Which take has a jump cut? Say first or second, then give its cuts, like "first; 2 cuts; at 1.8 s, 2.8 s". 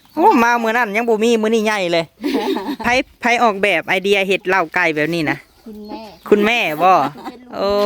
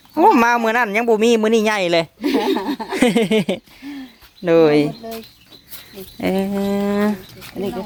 first; 1 cut; at 2.8 s